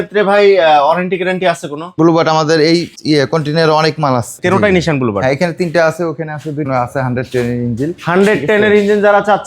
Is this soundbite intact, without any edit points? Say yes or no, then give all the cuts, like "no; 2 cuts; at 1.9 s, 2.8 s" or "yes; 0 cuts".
no; 2 cuts; at 1.9 s, 6.7 s